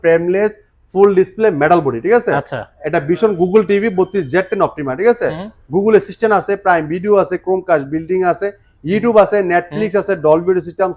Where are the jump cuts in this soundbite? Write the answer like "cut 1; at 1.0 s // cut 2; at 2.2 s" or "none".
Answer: none